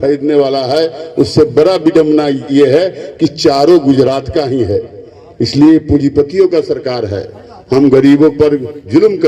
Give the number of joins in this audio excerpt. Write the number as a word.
zero